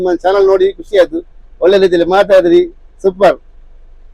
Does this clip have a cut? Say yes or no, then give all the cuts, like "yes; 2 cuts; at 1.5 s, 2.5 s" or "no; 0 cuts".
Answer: no; 0 cuts